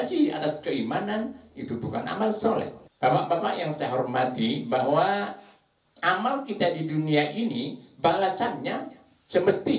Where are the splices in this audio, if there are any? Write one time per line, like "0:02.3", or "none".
0:02.8